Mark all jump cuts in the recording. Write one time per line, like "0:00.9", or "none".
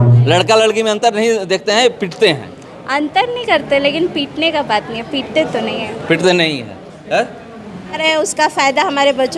0:08.0